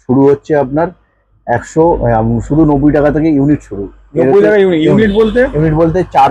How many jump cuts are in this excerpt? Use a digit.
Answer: 0